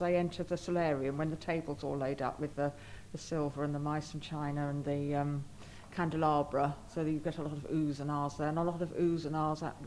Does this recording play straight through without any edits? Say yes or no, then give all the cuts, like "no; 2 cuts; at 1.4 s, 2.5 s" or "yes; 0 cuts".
yes; 0 cuts